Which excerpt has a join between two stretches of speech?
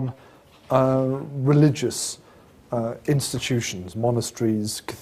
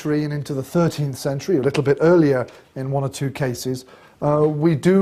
first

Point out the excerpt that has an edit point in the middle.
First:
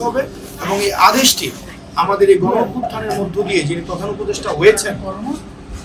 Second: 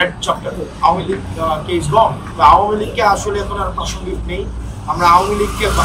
second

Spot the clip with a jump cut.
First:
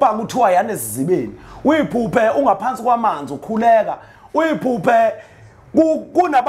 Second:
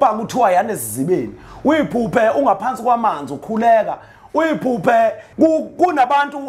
second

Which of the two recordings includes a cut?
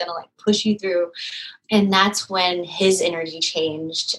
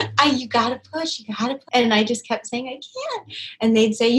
second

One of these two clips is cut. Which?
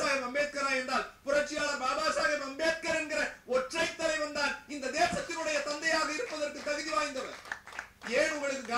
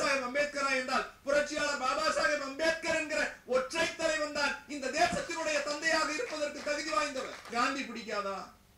second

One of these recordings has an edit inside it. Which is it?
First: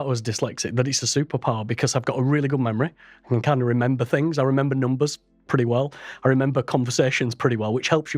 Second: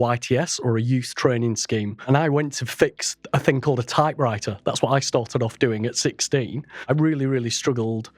second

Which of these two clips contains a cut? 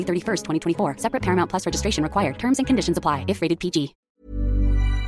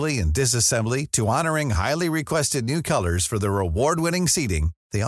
first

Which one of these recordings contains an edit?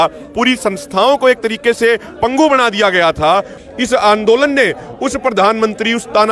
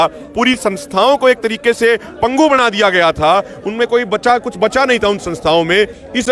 first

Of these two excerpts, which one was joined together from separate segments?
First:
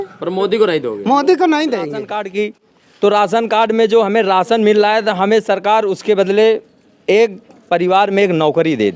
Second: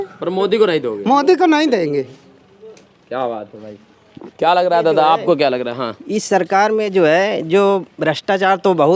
first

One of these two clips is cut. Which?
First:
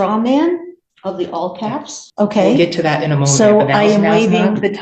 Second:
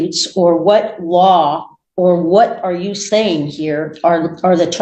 first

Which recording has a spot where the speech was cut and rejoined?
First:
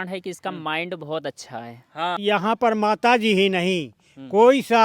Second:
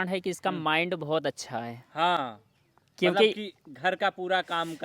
first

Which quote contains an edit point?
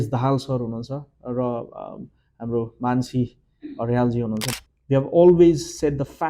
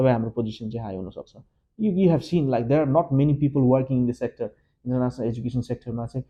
first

